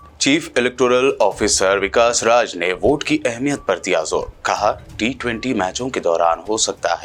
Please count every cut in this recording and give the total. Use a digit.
0